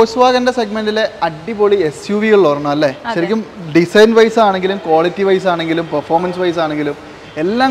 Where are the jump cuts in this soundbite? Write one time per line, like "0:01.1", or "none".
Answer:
none